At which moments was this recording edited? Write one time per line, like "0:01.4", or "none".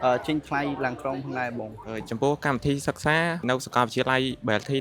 0:01.8
0:03.4